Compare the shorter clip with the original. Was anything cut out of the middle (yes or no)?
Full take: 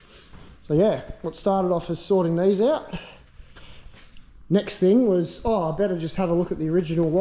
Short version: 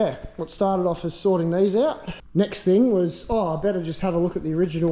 yes